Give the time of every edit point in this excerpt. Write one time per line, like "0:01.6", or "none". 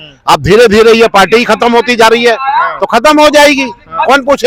none

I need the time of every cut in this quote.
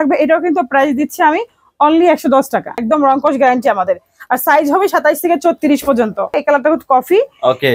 0:02.8
0:06.4

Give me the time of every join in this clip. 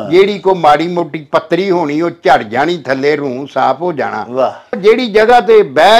0:04.8

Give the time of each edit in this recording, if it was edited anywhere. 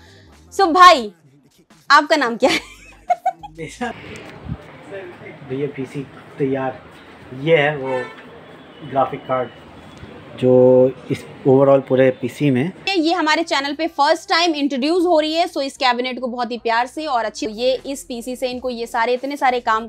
0:03.9
0:12.8
0:17.5

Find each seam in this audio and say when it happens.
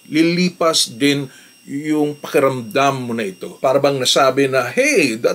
0:03.5

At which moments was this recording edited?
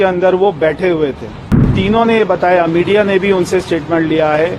0:01.7

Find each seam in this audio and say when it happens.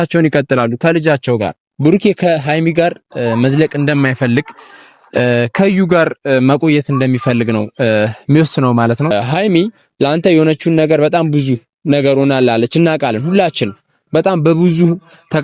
0:01.6
0:09.1

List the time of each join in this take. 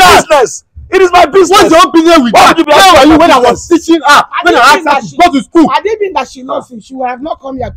none

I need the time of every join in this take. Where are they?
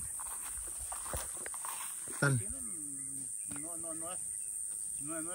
0:02.2

